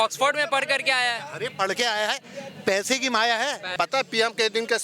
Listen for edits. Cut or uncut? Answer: cut